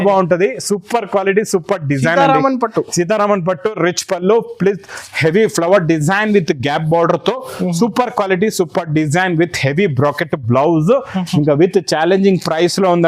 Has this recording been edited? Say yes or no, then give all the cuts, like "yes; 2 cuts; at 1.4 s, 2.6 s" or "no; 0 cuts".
no; 0 cuts